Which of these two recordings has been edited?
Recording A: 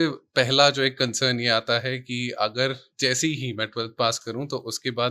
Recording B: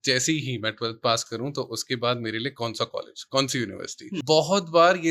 B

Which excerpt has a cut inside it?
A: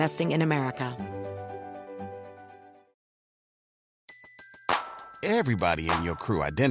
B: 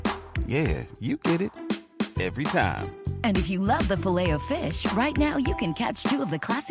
A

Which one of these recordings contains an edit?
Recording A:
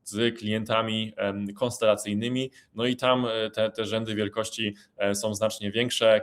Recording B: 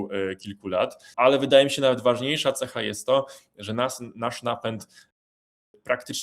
B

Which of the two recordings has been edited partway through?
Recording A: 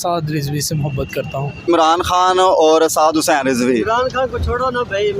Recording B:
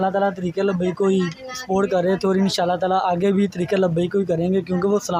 A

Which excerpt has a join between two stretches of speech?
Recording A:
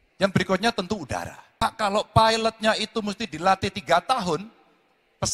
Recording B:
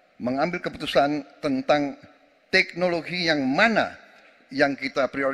A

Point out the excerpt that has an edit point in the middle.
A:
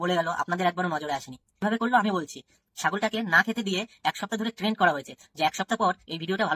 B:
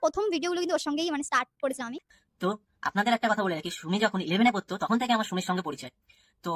B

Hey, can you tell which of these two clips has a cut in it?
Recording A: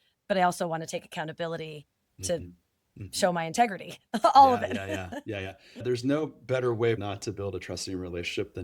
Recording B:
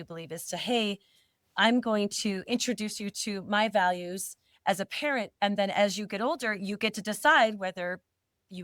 A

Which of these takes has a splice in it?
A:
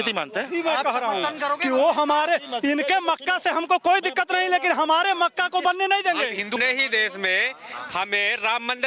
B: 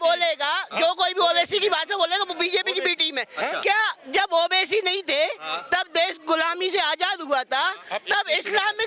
A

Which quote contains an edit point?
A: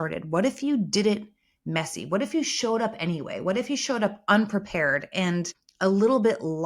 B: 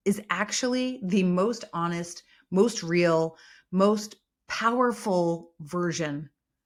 A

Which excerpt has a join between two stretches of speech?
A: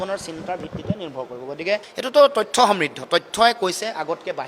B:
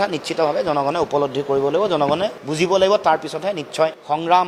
A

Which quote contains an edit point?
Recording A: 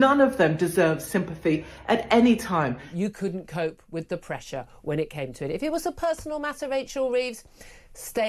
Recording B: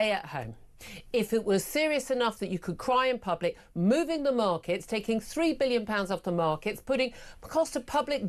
A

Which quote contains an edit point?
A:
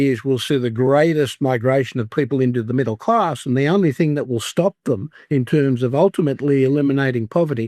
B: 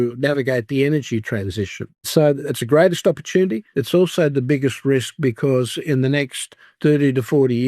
B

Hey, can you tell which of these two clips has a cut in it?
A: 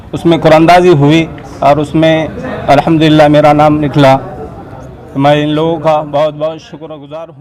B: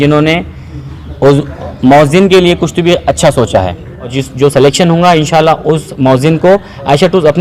B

